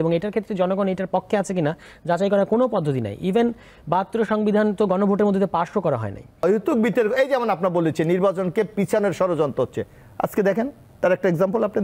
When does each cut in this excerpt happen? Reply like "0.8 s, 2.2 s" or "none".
6.4 s